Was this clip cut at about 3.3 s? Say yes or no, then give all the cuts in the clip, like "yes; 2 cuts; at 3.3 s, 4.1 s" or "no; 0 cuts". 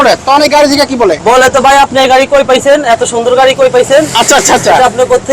no; 1 cut; at 1.2 s